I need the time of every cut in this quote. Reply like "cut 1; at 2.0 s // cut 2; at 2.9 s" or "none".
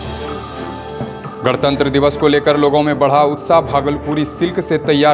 none

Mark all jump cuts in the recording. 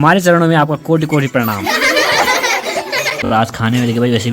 cut 1; at 3.3 s

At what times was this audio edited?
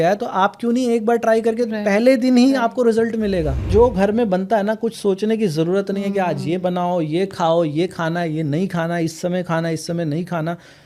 cut 1; at 3.7 s

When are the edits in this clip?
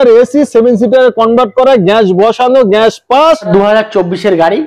cut 1; at 3.5 s

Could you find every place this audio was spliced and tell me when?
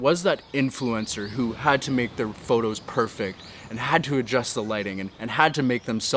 none

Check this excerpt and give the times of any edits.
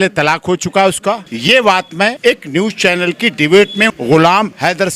cut 1; at 1.3 s // cut 2; at 2.2 s // cut 3; at 3.9 s

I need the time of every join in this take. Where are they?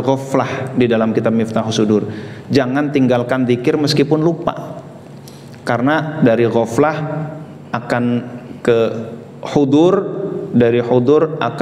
none

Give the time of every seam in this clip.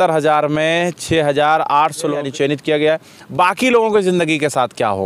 cut 1; at 2.2 s

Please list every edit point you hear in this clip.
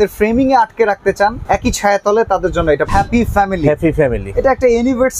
cut 1; at 1.4 s // cut 2; at 2.9 s

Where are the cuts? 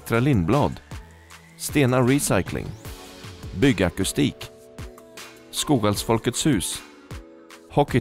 none

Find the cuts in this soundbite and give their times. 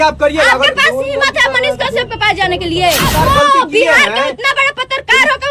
cut 1; at 3.1 s

